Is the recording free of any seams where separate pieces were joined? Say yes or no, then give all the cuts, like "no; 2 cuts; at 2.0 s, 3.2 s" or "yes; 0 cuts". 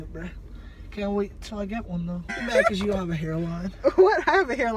no; 1 cut; at 2.3 s